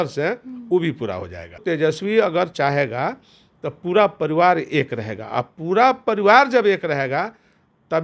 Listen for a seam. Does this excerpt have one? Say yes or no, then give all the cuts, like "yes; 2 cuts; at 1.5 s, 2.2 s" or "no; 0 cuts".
yes; 1 cut; at 1.6 s